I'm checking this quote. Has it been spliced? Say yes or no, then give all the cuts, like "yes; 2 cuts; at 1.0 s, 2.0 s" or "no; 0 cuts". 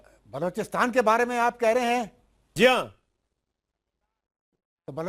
yes; 1 cut; at 3.9 s